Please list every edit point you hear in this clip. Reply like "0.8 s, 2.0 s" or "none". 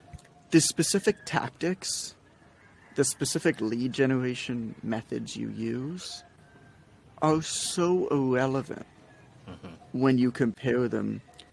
none